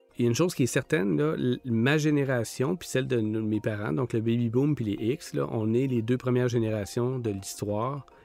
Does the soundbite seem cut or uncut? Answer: uncut